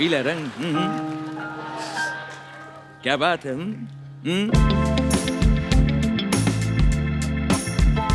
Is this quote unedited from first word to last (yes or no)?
yes